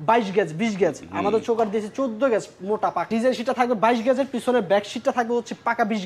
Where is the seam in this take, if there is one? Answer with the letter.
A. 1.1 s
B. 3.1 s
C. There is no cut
B